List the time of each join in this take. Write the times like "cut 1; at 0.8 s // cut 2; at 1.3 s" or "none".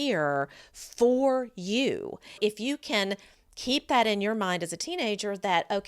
cut 1; at 2.4 s

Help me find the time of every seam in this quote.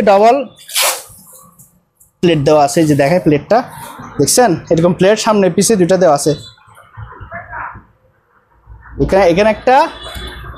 none

